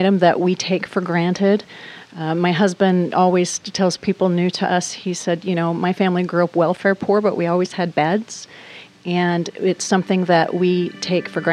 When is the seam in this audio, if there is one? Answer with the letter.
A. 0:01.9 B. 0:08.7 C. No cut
C